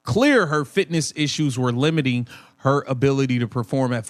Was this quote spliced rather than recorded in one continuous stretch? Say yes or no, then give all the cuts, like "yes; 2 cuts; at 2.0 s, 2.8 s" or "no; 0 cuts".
no; 0 cuts